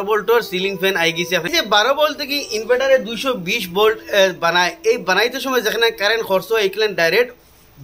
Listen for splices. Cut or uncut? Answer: cut